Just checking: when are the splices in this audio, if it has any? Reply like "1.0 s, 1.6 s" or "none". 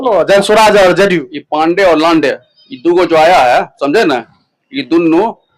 none

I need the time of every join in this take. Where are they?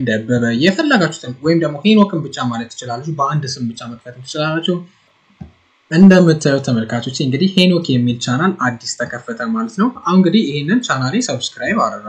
5.1 s, 10.0 s

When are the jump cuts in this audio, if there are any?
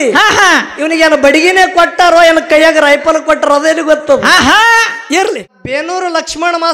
5.6 s

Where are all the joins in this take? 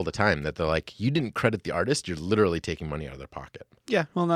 none

